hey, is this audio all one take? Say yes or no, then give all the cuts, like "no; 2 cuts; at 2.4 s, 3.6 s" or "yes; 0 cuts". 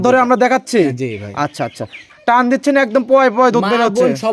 no; 1 cut; at 1.9 s